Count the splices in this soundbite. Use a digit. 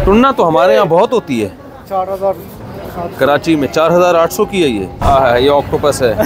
1